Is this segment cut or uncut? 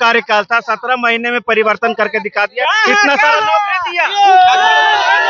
uncut